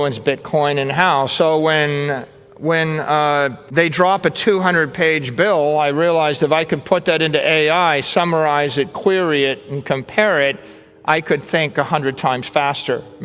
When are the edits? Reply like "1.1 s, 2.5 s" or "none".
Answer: 3.6 s